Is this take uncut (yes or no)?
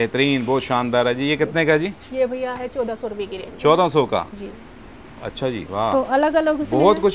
yes